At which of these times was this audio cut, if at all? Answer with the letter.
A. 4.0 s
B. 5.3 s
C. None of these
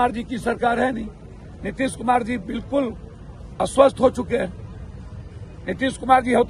C